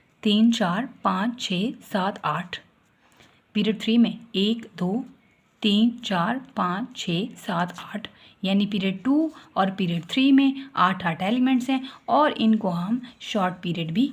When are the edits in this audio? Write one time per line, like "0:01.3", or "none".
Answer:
none